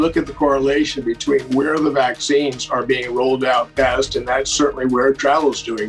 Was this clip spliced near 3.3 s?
no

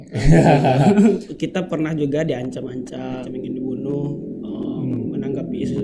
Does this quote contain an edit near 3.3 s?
yes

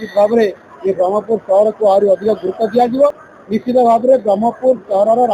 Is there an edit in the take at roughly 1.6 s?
no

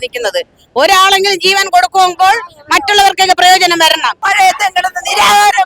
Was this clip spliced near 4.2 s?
yes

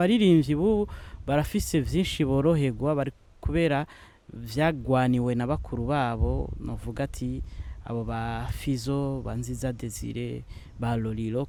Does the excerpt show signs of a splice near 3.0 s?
no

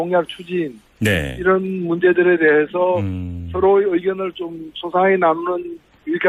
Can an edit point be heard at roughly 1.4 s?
no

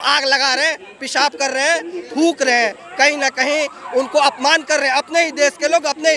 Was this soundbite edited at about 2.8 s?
no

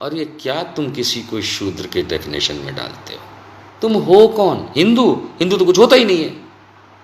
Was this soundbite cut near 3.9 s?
yes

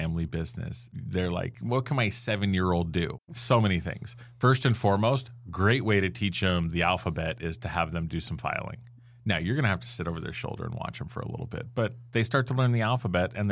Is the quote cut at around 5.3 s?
no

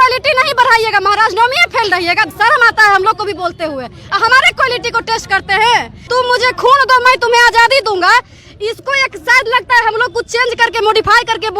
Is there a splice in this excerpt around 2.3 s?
yes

